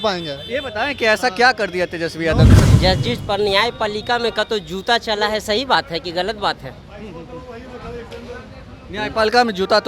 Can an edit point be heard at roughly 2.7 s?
yes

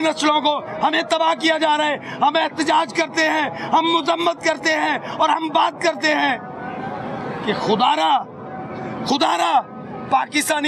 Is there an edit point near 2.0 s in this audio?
no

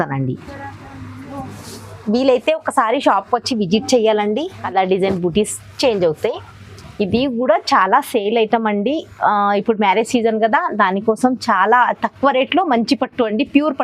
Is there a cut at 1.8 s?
no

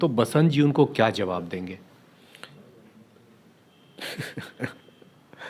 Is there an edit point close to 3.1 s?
no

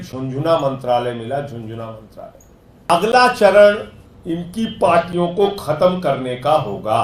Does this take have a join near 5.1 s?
no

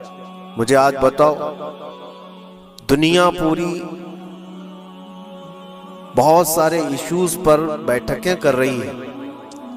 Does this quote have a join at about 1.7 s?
no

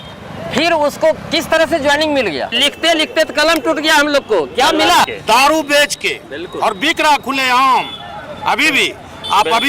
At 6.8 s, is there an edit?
no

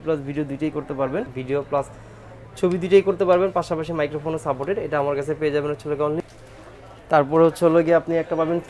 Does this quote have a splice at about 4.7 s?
no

